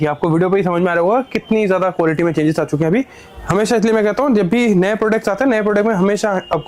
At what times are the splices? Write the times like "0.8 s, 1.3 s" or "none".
none